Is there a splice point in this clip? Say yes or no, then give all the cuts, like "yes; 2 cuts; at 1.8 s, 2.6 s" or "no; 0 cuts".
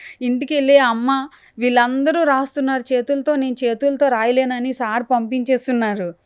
no; 0 cuts